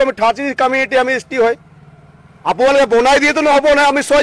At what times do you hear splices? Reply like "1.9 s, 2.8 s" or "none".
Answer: none